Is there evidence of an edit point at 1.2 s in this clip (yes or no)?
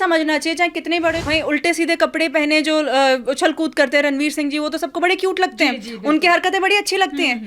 yes